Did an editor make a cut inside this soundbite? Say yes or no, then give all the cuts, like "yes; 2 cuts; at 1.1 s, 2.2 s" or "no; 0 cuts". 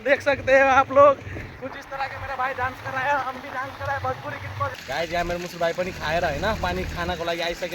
yes; 1 cut; at 4.7 s